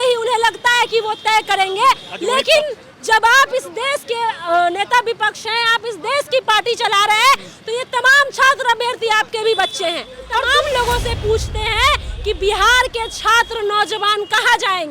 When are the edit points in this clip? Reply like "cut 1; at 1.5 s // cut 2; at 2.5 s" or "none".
cut 1; at 10.4 s